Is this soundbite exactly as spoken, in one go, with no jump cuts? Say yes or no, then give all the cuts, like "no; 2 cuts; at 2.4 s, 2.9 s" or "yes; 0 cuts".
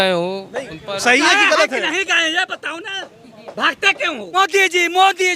no; 1 cut; at 4.3 s